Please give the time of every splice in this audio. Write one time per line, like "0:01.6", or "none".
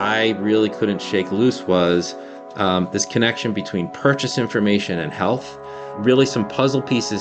none